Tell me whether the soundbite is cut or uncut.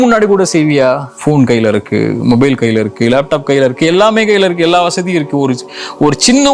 cut